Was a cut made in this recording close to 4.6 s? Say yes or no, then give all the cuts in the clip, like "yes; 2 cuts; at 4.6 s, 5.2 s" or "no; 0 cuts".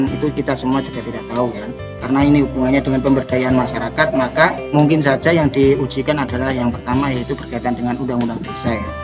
yes; 1 cut; at 4.6 s